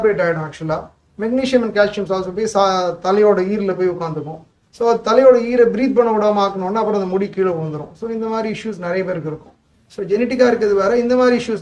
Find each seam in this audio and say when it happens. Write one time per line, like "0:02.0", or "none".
none